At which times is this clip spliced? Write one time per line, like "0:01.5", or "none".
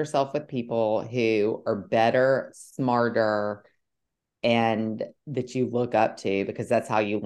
none